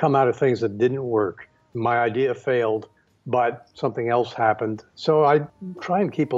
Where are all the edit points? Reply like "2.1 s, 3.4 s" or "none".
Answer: 1.7 s, 4.8 s, 5.5 s